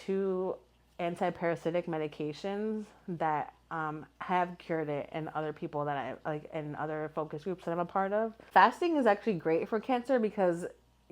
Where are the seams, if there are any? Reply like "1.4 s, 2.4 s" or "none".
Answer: 8.4 s